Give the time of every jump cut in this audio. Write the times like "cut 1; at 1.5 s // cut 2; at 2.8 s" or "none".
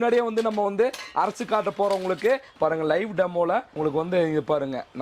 cut 1; at 2.5 s // cut 2; at 3.7 s